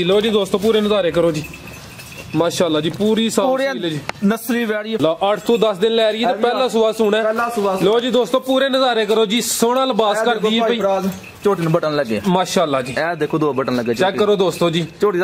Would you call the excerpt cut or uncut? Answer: cut